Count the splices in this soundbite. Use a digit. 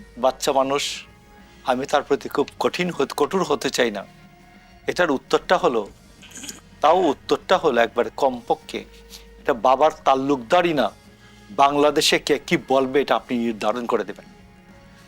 0